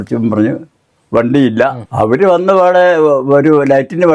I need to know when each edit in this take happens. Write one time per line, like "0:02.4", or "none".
0:01.8